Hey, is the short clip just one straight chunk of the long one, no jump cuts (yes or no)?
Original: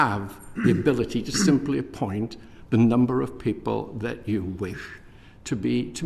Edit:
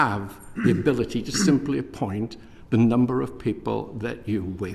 yes